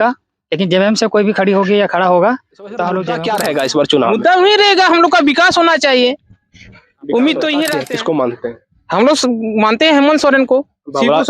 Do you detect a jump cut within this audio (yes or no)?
yes